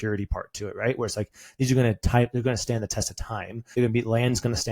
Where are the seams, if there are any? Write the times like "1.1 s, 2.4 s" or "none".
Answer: 3.6 s